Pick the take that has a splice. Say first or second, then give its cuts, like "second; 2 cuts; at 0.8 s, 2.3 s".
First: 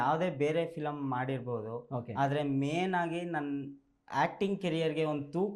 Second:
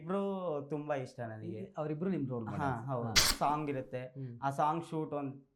second; 1 cut; at 3.2 s